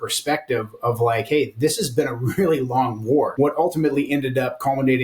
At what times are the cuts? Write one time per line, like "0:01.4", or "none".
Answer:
0:03.3